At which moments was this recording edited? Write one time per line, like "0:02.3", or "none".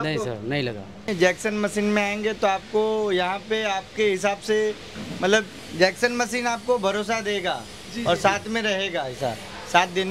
0:01.0